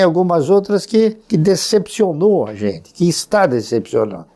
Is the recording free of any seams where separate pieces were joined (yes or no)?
yes